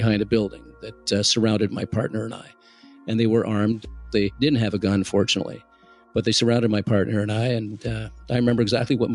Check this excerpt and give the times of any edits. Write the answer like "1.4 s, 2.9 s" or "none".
4.3 s